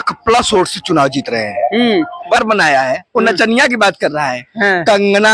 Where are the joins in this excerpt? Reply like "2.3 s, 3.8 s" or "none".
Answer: 2.4 s